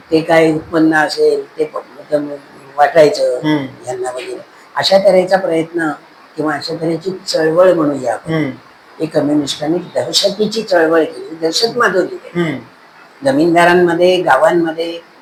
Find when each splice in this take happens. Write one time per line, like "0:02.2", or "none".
none